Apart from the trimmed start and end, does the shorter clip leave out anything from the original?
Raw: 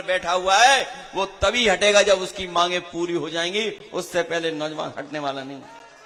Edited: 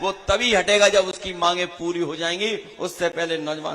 no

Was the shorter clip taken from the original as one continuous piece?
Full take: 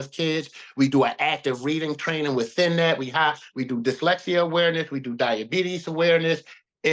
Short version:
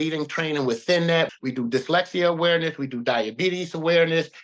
no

